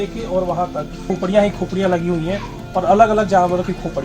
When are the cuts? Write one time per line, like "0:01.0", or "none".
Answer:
0:01.0

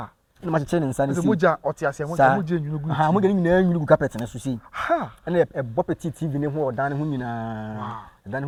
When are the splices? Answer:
none

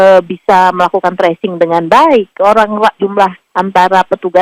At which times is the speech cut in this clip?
none

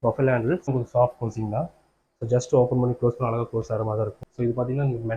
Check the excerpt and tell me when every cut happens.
0:00.7
0:04.2

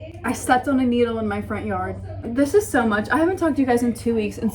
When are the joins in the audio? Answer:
0:02.2

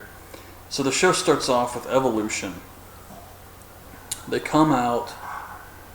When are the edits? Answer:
0:01.2

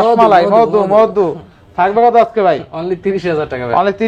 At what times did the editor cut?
none

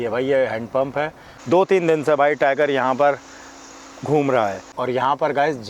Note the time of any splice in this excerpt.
0:01.3
0:04.7

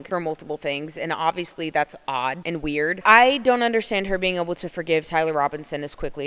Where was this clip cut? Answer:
0:03.0

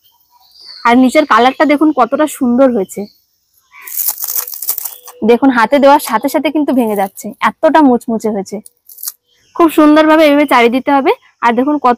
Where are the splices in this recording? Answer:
0:03.9
0:09.4

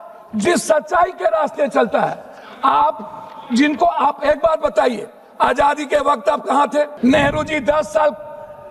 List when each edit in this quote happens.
0:06.9

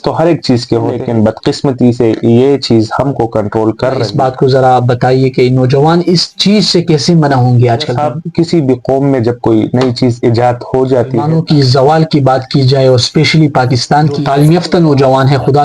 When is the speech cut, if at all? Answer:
0:01.0
0:04.1
0:07.9
0:11.2
0:14.2

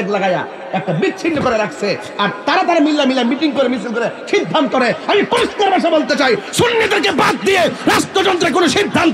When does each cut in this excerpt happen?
none

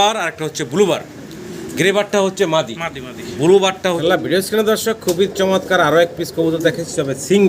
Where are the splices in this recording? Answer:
0:04.0

